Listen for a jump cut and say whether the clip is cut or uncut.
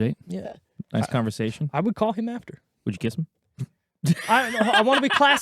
uncut